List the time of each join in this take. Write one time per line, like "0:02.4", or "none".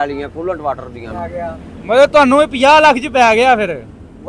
0:01.1